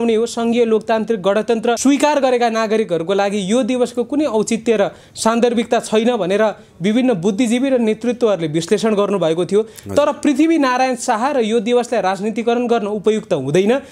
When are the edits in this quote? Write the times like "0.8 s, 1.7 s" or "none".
1.8 s